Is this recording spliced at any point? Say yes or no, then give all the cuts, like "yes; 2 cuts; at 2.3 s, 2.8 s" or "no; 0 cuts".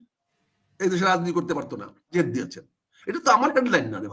yes; 1 cut; at 2.1 s